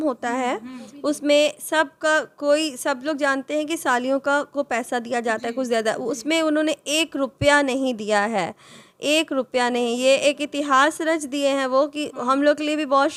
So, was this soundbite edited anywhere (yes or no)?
no